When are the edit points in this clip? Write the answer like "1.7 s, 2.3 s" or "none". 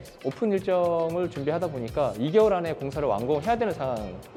none